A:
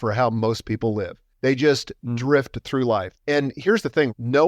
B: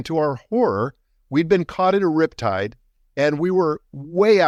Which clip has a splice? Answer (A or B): A